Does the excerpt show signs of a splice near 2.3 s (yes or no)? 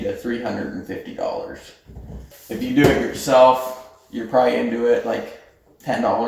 yes